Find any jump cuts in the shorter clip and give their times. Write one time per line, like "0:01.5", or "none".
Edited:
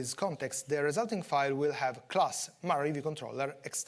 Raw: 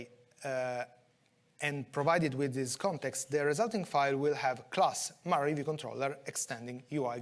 none